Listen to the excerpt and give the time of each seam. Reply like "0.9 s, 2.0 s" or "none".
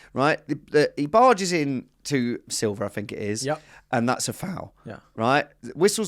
2.4 s